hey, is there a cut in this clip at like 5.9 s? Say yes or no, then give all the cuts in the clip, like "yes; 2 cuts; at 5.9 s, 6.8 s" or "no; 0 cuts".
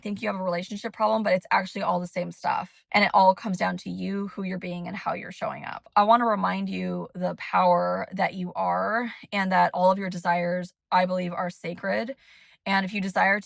yes; 2 cuts; at 2.8 s, 5.9 s